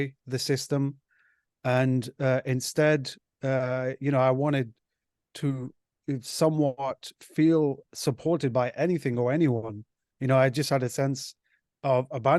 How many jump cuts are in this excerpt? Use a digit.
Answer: 0